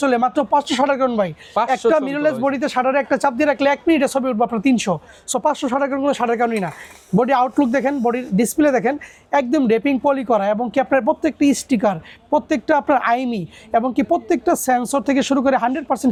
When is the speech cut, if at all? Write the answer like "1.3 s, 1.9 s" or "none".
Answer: none